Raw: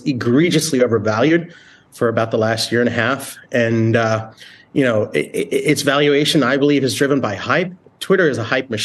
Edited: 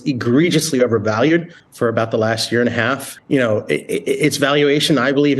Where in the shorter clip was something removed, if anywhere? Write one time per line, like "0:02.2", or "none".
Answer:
0:01.6
0:03.1